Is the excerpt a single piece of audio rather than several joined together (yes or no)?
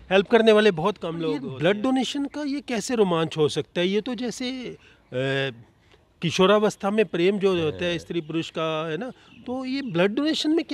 no